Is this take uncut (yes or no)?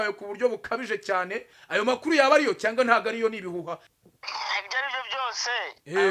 no